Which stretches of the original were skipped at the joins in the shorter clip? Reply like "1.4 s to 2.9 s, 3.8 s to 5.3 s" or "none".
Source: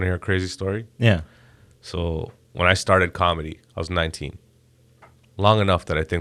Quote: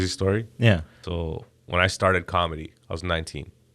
1.4 s to 1.8 s